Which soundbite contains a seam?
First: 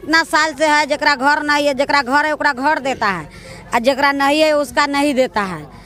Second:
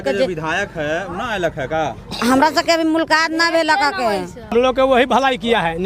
second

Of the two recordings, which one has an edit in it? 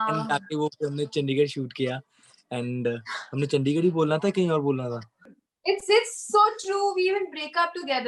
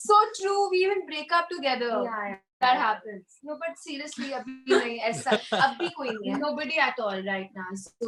first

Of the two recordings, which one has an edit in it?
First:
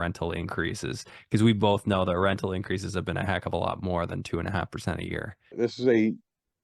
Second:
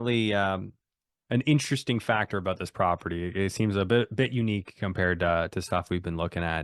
first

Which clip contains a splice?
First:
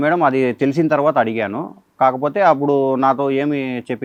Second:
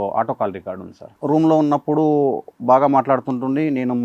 second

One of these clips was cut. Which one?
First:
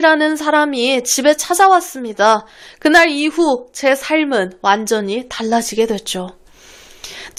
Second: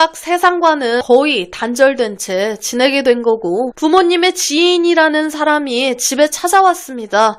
second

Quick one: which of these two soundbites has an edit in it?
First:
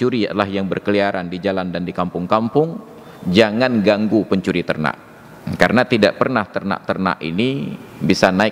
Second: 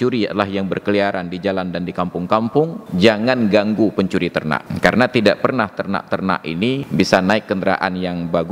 second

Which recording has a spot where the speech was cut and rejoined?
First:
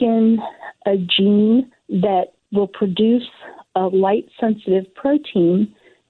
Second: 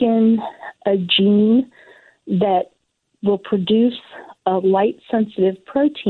first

